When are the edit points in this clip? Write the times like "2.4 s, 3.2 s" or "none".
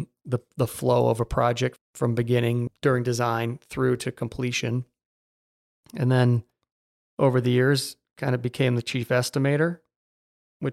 1.8 s, 2.7 s

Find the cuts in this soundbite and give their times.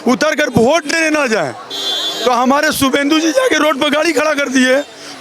none

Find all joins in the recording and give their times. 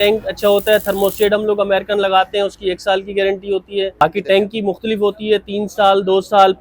4.0 s

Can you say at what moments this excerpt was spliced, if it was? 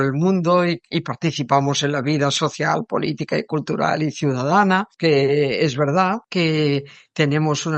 4.9 s, 6.2 s

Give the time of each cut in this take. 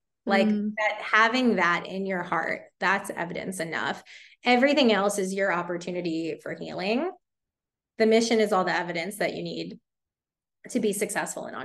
none

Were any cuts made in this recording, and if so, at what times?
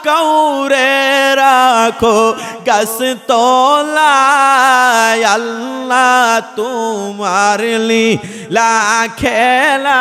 none

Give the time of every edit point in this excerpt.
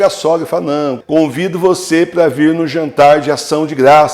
1.0 s

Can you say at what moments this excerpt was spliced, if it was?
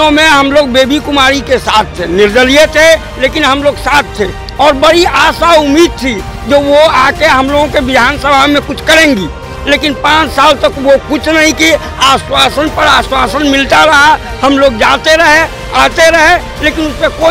none

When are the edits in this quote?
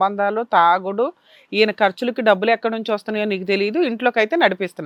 none

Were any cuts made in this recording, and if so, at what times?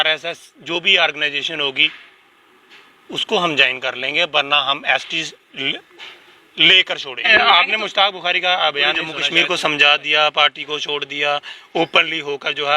7.2 s, 9.1 s

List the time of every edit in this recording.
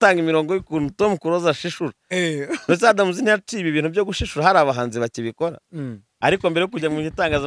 6.1 s

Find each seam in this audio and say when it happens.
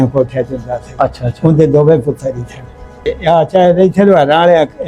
3.0 s

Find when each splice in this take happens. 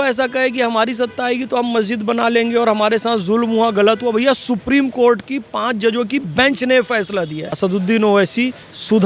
7.4 s

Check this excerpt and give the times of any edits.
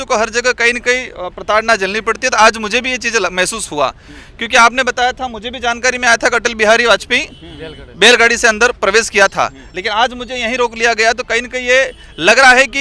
none

